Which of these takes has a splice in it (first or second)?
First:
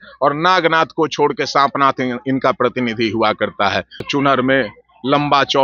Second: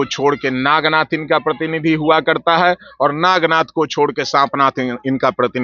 first